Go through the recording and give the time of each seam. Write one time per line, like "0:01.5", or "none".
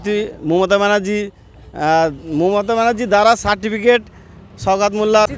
none